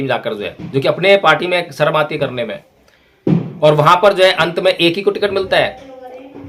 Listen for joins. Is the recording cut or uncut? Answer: uncut